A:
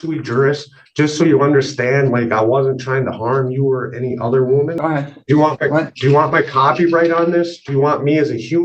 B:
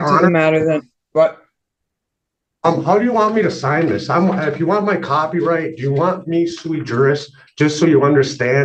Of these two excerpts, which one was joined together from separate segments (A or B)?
A